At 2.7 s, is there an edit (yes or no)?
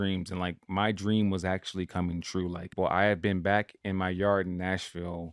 yes